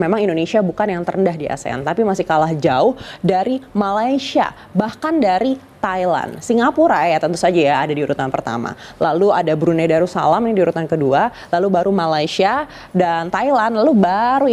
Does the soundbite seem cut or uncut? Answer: uncut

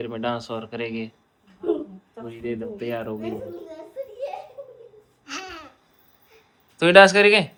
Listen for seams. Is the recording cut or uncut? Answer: uncut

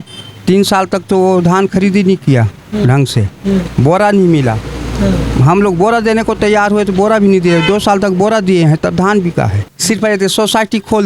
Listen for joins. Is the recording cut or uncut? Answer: cut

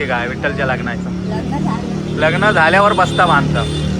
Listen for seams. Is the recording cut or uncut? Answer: uncut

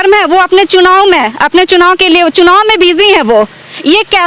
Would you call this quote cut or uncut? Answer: uncut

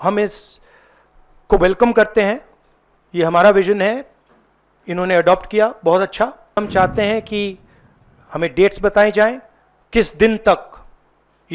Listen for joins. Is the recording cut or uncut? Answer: cut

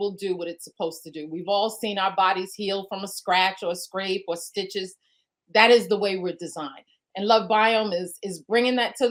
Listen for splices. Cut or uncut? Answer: uncut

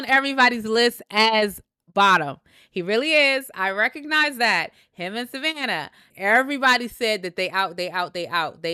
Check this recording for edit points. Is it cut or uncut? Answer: uncut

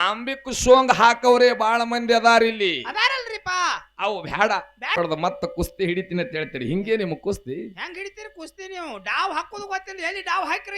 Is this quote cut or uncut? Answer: cut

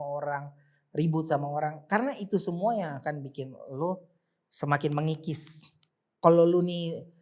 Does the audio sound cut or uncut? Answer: cut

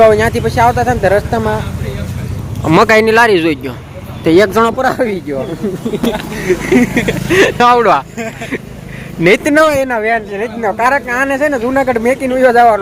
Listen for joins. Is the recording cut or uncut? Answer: uncut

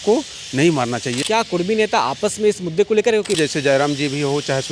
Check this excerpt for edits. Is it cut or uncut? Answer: cut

